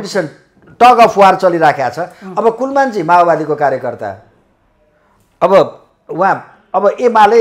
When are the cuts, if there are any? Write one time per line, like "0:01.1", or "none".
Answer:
none